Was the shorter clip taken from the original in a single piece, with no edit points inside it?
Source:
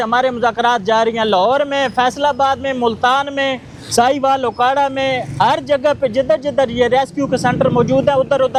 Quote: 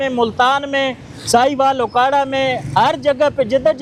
yes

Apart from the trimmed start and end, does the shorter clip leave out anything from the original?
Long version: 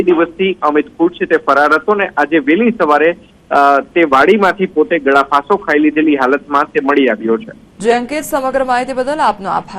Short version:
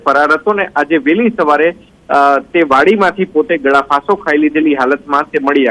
no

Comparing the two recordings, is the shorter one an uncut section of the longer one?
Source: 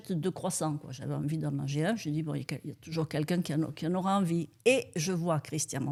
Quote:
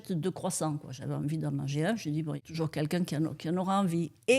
no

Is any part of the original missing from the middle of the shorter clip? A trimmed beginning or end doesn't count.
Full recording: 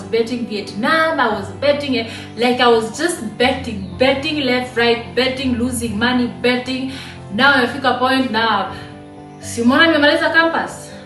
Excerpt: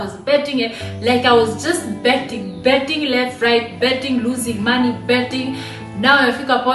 no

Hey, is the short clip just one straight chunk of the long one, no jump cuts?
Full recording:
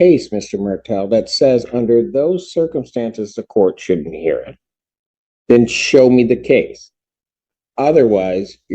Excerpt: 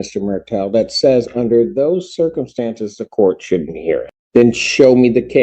no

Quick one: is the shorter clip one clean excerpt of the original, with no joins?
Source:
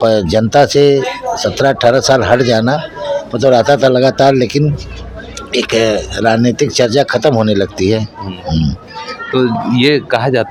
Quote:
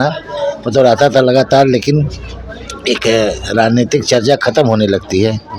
yes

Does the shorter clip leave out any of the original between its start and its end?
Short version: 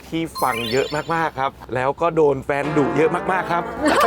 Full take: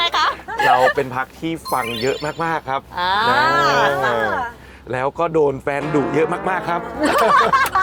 yes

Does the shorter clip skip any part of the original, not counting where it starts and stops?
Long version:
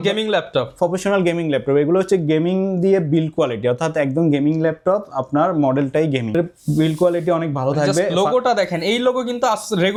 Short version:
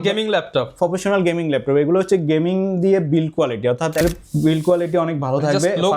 yes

